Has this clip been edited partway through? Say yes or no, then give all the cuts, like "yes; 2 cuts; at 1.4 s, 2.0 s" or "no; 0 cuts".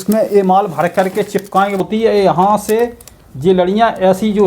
yes; 1 cut; at 1.8 s